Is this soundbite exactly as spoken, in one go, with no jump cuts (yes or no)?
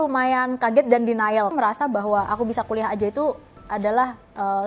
no